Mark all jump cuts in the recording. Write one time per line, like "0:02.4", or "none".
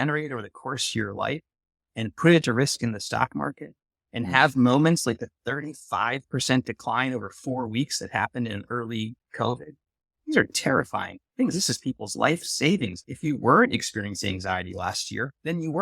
0:13.1